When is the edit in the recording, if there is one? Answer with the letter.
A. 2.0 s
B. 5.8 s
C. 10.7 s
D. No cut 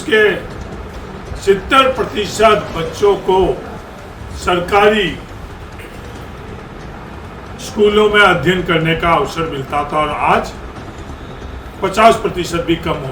D